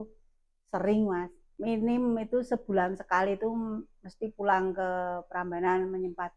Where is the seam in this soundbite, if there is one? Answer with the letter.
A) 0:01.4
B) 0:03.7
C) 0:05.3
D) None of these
A